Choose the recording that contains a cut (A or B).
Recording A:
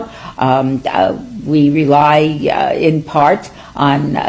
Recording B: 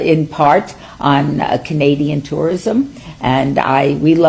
B